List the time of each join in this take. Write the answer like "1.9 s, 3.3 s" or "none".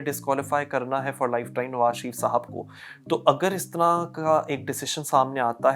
none